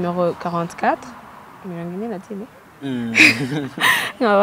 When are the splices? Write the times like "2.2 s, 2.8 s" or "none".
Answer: none